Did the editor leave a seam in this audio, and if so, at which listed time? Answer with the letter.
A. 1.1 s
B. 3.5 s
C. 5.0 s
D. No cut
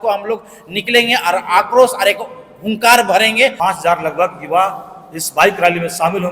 B